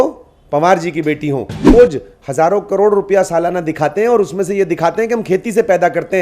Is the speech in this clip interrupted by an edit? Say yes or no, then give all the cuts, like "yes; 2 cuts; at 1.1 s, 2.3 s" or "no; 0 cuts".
yes; 1 cut; at 1.7 s